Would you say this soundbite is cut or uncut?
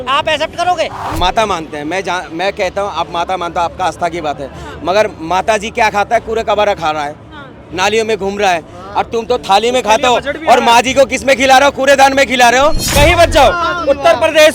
cut